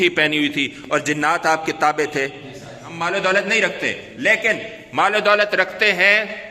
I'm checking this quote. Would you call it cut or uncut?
cut